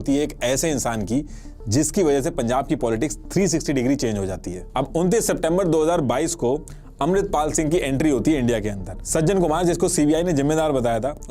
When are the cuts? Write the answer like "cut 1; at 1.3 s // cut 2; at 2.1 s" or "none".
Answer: cut 1; at 4.6 s // cut 2; at 9.0 s